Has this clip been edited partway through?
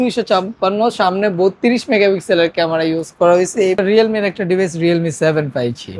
yes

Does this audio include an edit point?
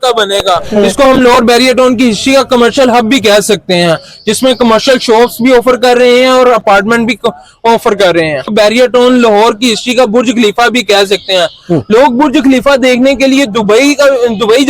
yes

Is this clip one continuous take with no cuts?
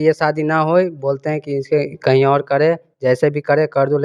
yes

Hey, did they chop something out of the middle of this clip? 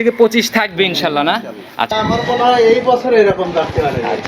yes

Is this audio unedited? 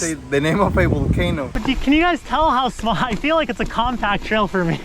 no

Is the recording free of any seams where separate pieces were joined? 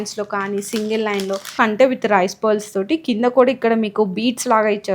no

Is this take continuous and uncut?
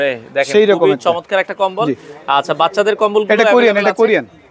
yes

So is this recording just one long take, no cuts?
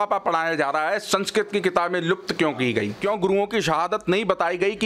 no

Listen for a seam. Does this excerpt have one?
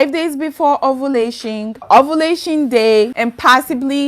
yes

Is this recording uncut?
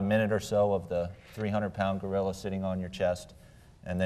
yes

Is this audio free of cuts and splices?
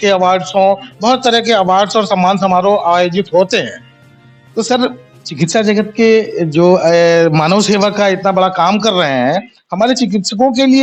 yes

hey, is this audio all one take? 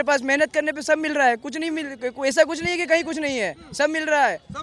yes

